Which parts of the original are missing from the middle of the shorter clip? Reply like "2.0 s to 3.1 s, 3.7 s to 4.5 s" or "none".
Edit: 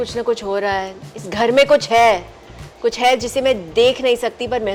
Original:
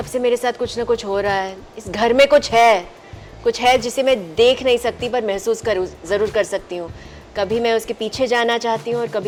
none